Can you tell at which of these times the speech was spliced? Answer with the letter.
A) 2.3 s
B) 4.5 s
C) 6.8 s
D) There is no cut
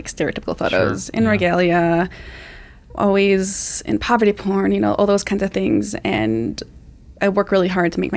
D